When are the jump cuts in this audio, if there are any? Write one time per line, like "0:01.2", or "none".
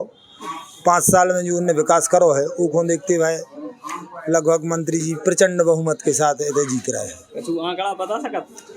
none